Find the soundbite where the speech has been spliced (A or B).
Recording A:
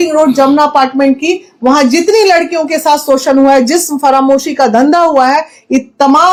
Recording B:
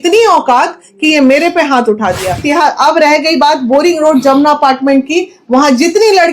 B